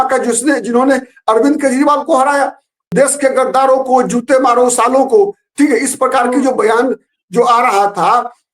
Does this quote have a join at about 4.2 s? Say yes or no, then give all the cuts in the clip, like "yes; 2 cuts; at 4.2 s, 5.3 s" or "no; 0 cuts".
no; 1 cut; at 2.9 s